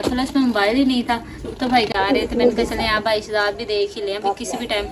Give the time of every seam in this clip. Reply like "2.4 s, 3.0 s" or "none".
1.9 s